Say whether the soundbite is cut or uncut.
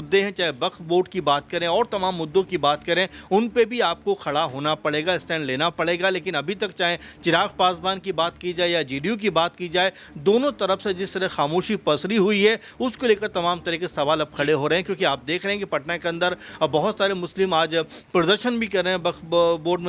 uncut